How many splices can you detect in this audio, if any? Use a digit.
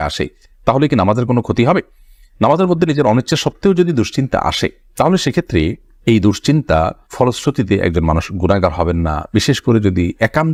0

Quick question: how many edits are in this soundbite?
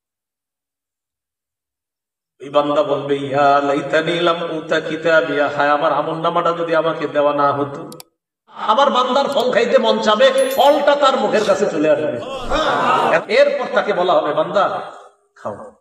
2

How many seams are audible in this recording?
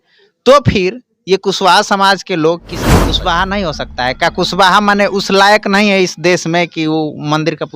1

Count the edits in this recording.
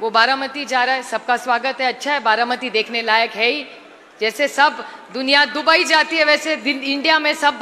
0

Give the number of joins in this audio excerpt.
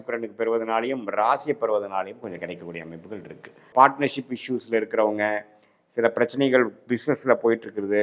1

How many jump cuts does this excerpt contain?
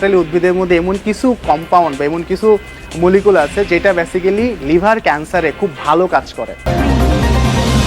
1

